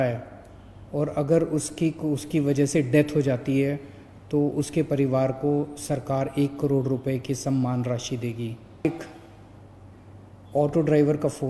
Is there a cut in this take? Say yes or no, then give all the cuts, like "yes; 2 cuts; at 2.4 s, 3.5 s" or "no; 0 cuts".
yes; 1 cut; at 8.9 s